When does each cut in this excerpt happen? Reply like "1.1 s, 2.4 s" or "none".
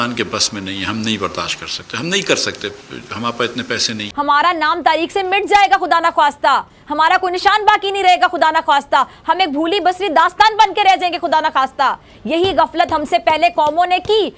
4.0 s